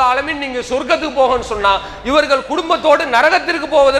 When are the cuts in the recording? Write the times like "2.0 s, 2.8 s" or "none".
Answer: none